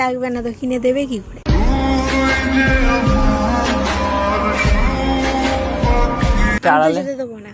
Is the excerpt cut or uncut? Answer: cut